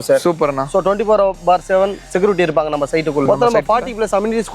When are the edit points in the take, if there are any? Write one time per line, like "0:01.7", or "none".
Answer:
0:03.2